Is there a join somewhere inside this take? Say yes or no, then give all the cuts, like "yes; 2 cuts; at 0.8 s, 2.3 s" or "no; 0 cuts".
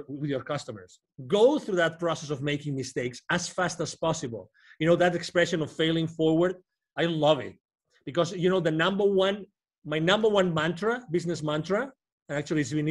yes; 1 cut; at 1.1 s